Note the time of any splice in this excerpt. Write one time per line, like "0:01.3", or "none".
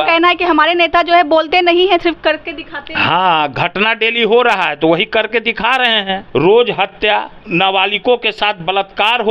0:06.2
0:07.4